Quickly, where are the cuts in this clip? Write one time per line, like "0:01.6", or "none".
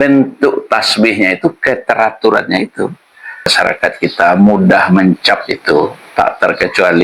0:03.5